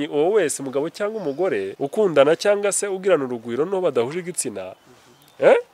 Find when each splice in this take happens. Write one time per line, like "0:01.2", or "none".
0:01.7